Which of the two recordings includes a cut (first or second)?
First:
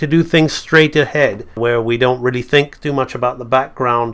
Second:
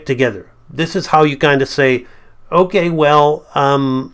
first